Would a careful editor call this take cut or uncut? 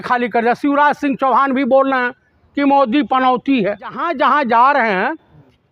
cut